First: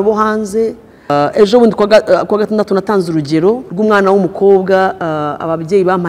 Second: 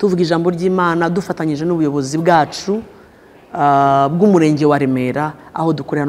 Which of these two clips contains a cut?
first; 2 cuts; at 1.1 s, 3.7 s

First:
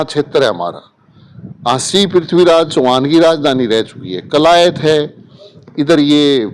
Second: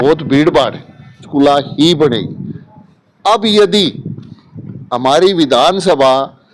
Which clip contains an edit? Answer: second; 1 cut; at 1.2 s

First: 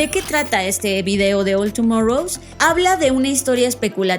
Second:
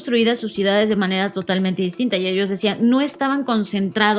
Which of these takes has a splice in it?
first; 1 cut; at 2.4 s

